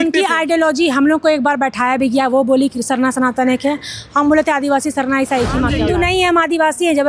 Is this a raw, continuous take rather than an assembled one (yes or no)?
no